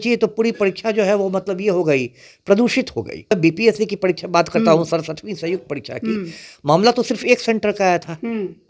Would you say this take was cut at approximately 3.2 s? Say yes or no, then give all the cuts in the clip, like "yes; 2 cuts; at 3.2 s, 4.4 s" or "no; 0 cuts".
yes; 1 cut; at 3.2 s